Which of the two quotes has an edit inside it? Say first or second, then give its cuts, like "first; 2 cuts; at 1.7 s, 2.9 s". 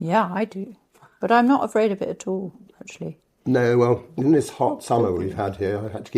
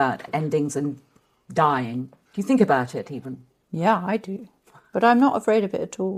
first; 1 cut; at 4.1 s